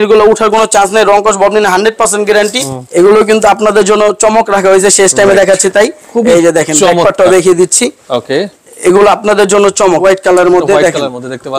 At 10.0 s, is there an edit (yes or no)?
yes